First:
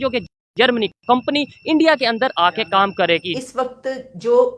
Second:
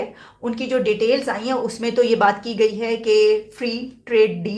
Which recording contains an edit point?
first; 1 cut; at 3.4 s

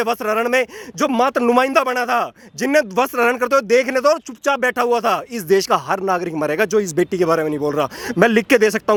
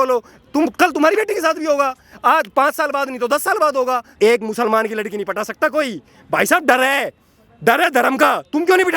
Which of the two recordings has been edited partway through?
second; 1 cut; at 4.1 s

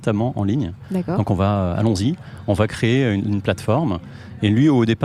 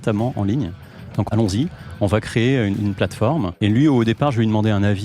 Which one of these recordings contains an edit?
second; 2 cuts; at 1.3 s, 3.5 s

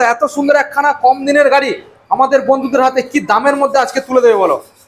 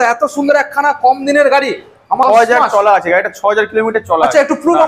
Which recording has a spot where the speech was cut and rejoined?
second; 1 cut; at 2.2 s

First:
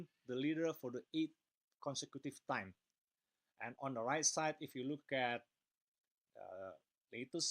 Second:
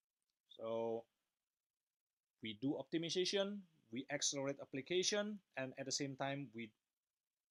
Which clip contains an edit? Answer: first; 1 cut; at 5.1 s

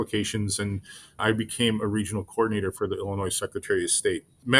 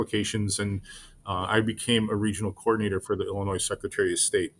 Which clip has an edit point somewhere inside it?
first; 1 cut; at 1.2 s

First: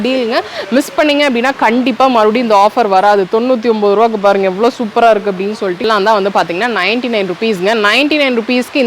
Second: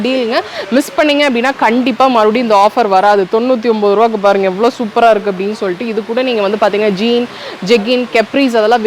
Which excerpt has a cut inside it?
first; 1 cut; at 5.8 s

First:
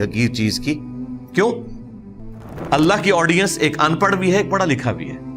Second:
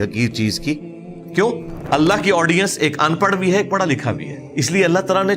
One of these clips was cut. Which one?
second; 2 cuts; at 1.7 s, 4.3 s

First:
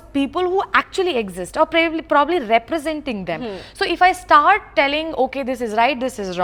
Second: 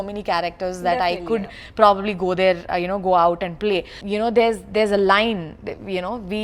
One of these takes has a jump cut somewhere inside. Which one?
second; 1 cut; at 4.0 s

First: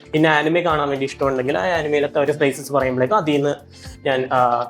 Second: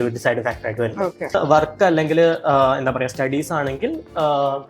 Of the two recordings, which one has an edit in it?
second; 1 cut; at 1.4 s

